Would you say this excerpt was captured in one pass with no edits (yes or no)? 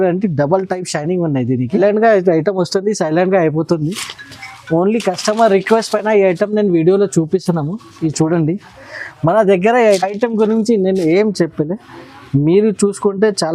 no